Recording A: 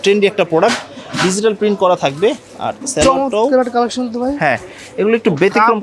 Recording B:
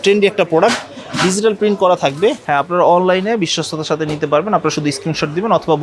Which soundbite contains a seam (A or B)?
B